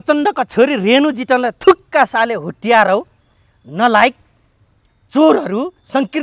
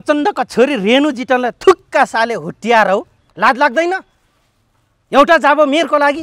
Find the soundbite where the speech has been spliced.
second; 1 cut; at 3.2 s

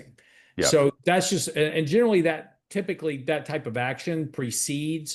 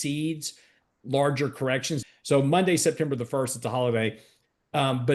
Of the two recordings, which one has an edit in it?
second; 1 cut; at 1.9 s

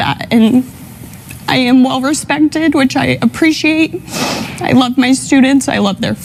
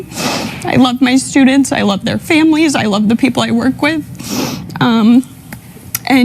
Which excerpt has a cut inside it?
second; 1 cut; at 3.3 s

